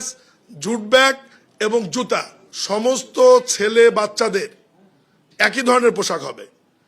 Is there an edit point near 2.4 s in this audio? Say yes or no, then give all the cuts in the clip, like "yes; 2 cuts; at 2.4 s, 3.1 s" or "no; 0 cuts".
yes; 1 cut; at 2.4 s